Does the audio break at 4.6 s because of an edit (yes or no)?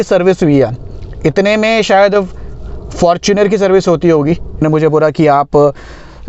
yes